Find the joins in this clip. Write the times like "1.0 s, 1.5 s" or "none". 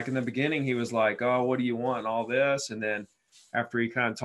none